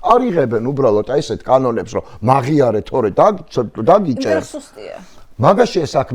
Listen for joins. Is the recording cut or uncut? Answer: uncut